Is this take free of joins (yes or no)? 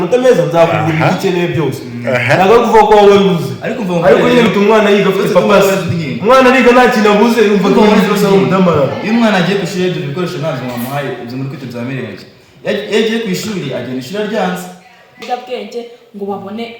no